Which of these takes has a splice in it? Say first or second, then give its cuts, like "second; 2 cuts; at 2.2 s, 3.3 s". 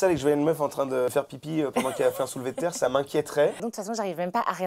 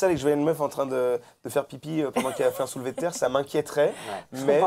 first; 2 cuts; at 1.1 s, 3.6 s